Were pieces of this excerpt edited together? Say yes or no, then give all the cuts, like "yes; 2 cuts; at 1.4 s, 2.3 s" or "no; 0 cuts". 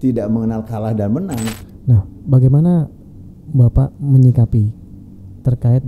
yes; 1 cut; at 1.6 s